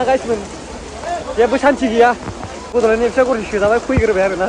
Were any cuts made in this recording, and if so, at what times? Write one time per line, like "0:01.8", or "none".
0:02.6

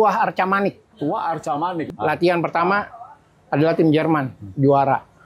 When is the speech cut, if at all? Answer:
0:00.9
0:01.9

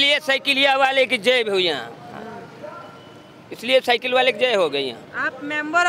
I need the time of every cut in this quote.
none

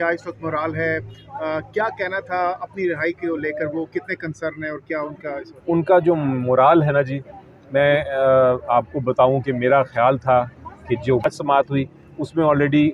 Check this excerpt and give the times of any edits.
0:11.2

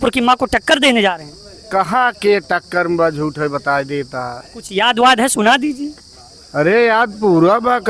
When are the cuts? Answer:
none

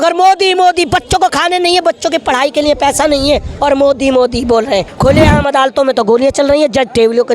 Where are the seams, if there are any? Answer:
0:04.9

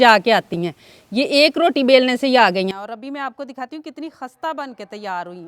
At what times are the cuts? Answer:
0:02.7

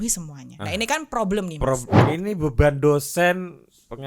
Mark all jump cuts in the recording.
0:02.0

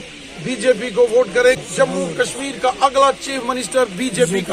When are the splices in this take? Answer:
0:01.6

